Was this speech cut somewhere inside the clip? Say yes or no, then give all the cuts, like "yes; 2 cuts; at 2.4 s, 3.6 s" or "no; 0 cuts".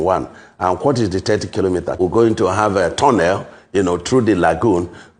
yes; 1 cut; at 2.0 s